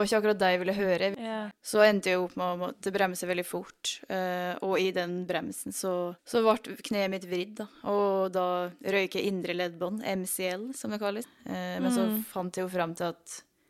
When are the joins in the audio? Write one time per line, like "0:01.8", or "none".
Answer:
0:01.3
0:06.2
0:11.3